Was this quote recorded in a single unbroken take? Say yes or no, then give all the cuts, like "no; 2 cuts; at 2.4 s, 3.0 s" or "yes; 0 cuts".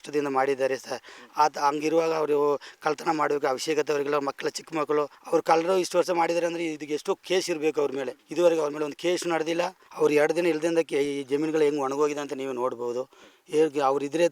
no; 3 cuts; at 5.2 s, 8.2 s, 9.8 s